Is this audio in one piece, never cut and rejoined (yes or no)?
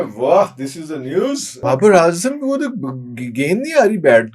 no